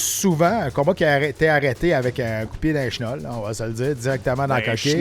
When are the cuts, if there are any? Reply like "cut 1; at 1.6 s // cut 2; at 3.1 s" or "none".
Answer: none